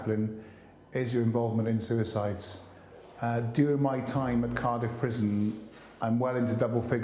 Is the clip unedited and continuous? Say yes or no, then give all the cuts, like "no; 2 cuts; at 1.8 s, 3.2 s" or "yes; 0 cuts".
yes; 0 cuts